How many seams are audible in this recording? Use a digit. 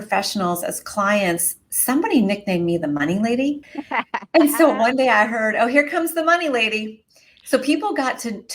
1